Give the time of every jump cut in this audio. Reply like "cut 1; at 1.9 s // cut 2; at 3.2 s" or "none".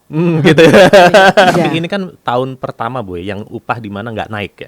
cut 1; at 1.5 s

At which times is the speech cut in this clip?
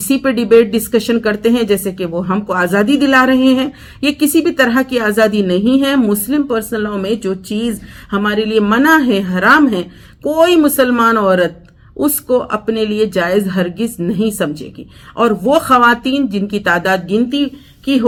none

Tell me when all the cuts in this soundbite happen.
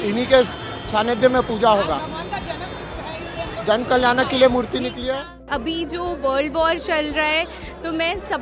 cut 1; at 5.4 s

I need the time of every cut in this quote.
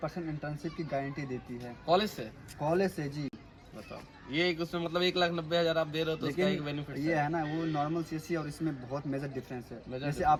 none

